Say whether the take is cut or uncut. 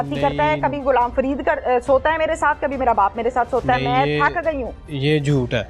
uncut